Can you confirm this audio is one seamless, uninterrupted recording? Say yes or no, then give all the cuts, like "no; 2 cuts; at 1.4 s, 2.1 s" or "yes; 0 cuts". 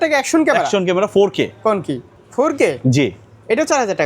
yes; 0 cuts